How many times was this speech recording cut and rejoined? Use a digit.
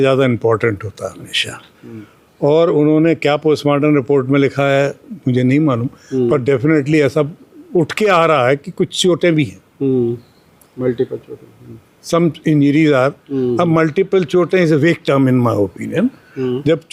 0